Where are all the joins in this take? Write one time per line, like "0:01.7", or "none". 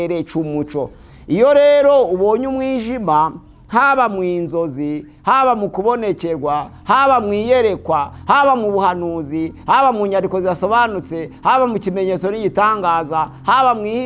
0:01.0